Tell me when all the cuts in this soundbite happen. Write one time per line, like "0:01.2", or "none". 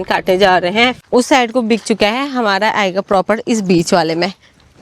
0:01.0

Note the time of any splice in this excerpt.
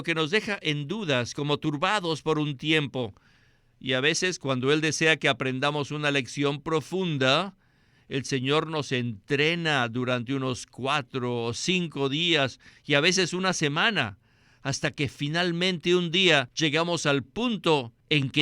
0:16.5

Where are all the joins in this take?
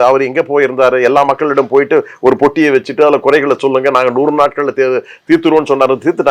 none

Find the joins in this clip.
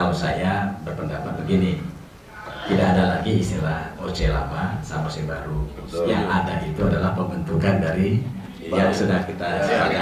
none

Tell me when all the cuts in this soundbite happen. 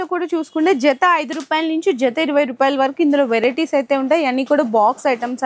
none

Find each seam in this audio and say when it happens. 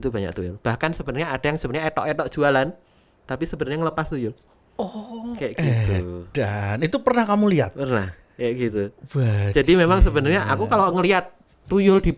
none

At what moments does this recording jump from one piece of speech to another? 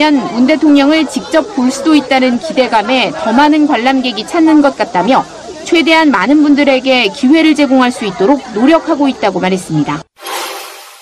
none

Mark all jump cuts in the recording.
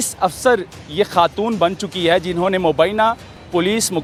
none

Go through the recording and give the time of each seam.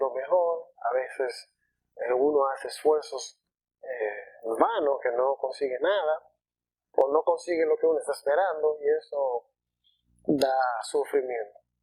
none

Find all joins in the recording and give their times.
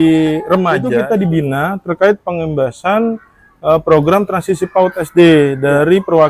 0:00.9

